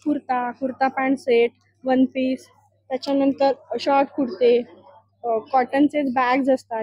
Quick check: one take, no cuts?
yes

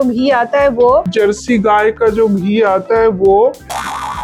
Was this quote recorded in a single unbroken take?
yes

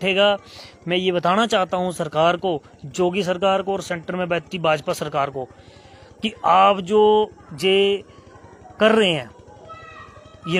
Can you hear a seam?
no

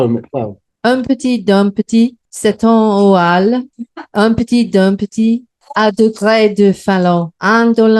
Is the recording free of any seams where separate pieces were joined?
no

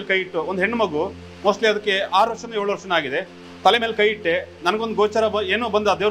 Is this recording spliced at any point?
no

